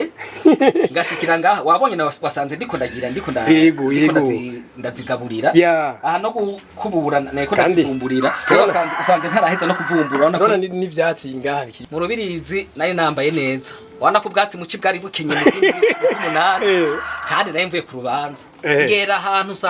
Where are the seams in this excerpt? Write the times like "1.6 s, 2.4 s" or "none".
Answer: 11.8 s